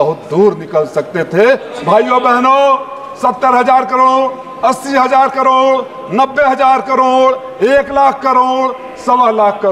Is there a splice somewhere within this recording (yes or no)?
yes